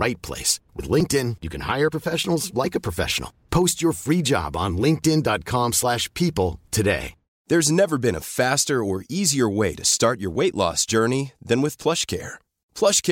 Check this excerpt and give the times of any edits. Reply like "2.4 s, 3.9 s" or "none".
none